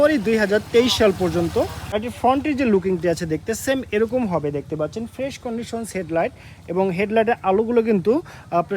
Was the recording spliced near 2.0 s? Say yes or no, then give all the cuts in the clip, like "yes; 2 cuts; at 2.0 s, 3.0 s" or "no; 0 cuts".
yes; 1 cut; at 2.0 s